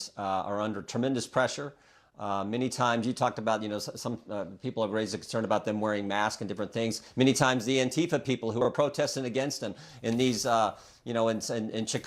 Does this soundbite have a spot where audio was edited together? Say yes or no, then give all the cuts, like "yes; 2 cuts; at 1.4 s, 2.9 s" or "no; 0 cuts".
no; 0 cuts